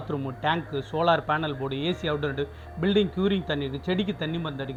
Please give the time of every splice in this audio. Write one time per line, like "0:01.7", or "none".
none